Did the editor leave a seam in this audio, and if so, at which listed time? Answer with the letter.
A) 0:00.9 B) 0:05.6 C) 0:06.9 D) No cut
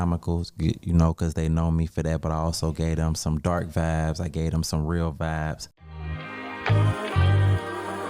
B